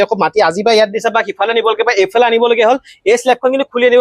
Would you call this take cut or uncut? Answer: uncut